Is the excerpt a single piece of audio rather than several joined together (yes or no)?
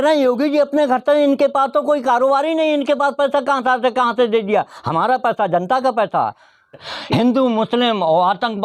no